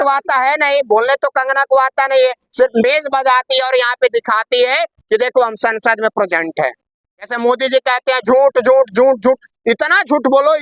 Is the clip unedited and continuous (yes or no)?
no